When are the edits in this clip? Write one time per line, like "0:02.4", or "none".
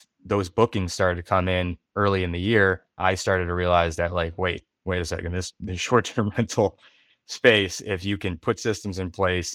none